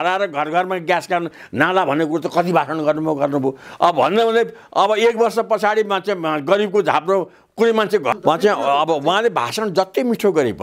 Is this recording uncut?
no; 1 cut; at 8.1 s

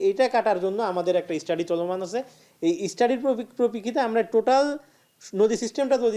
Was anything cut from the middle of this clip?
no; 0 cuts

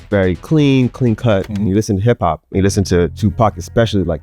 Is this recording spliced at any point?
yes; 2 cuts; at 1.5 s, 3.1 s

